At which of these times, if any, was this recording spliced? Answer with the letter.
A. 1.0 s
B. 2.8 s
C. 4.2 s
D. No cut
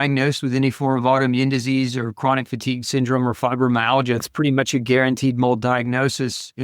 C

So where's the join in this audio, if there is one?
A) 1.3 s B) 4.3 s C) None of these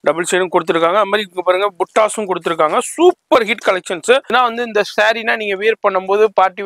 B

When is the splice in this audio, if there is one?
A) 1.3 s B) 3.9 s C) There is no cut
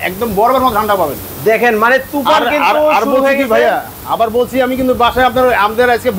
C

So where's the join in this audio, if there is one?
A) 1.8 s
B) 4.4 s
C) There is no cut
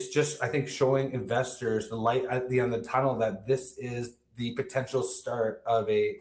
C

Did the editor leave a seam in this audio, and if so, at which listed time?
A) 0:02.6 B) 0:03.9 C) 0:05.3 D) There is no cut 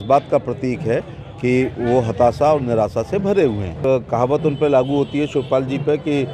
B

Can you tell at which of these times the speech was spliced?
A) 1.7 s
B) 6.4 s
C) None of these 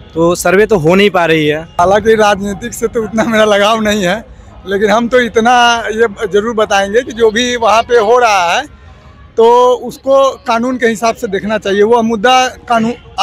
A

